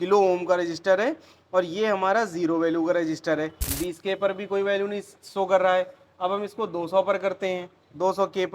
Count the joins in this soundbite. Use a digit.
1